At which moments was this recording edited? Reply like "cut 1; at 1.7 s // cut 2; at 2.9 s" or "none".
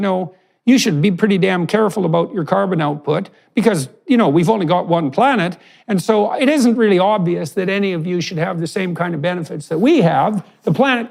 none